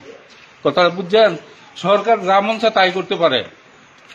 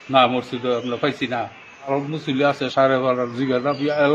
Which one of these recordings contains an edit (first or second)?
second